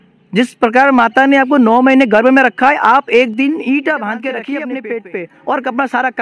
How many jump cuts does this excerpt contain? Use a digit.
1